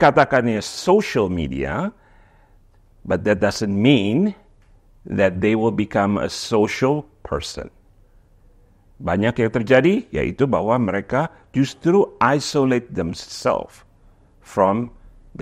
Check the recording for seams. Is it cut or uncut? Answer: uncut